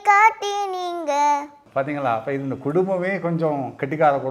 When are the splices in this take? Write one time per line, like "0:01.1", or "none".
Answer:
0:01.6